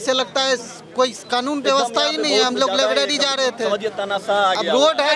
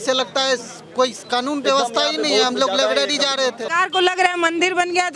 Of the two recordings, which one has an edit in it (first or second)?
second